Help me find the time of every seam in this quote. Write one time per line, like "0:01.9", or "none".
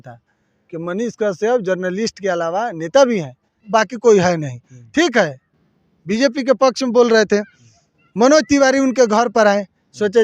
0:03.5

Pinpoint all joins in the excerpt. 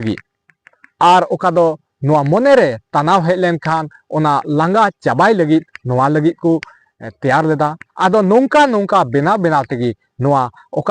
0:07.8

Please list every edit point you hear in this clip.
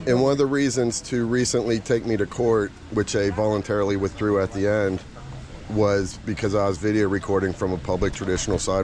none

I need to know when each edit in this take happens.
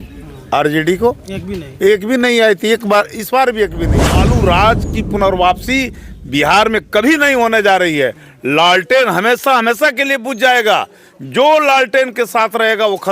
0:04.3

